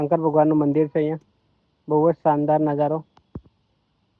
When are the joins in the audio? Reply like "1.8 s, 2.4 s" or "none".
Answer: none